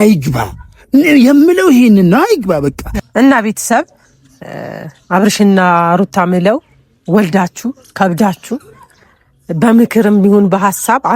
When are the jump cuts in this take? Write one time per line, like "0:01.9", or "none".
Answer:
0:02.9